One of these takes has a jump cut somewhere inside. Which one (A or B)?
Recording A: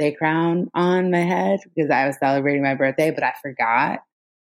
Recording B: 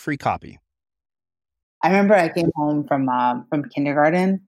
B